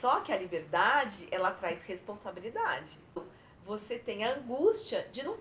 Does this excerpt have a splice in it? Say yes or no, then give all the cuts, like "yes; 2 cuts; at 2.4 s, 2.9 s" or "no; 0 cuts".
yes; 1 cut; at 3.2 s